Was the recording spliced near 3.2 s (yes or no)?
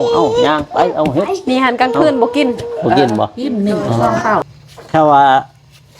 no